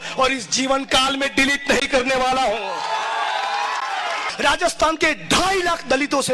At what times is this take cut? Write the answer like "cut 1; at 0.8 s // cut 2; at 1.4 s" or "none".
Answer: cut 1; at 4.3 s